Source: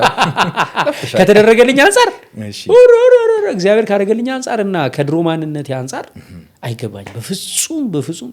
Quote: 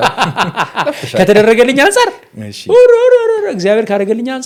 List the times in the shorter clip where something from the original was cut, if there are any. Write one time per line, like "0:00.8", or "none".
none

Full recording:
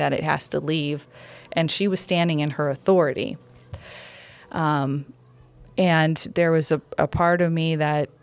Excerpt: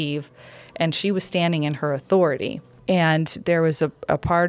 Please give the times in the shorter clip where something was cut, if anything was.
0:02.7

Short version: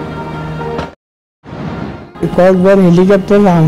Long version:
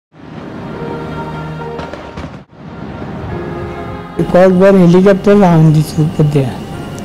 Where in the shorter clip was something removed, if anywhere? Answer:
0:02.1

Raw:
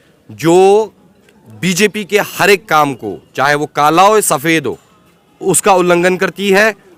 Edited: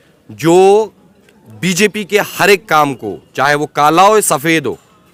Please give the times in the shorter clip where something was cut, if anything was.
none

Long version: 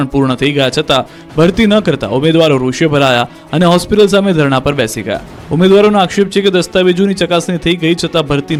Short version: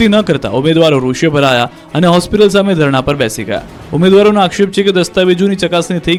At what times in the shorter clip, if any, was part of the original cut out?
none

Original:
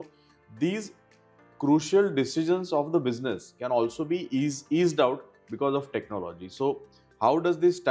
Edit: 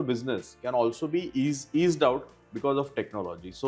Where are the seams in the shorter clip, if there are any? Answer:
none

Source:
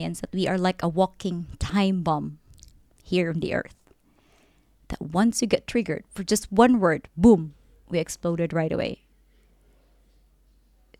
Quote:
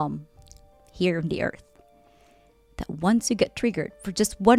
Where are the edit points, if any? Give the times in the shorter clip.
none

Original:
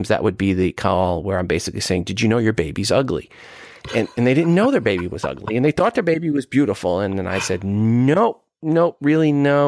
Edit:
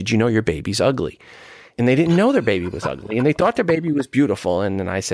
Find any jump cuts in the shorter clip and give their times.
0:01.7

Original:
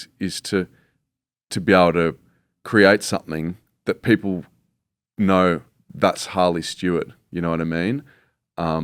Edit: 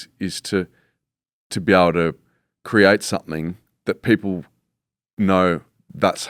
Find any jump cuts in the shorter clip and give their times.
none

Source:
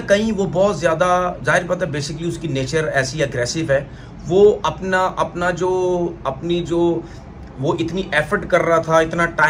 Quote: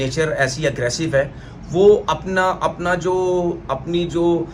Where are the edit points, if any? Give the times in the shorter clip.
none

